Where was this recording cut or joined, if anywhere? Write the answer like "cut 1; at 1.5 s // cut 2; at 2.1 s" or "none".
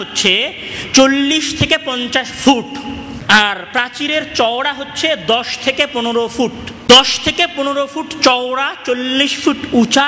cut 1; at 3.1 s // cut 2; at 6.7 s